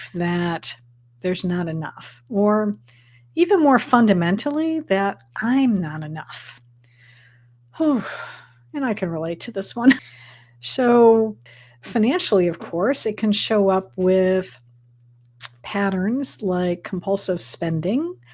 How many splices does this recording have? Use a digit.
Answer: 2